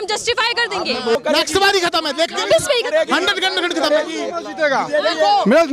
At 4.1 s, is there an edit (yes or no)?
no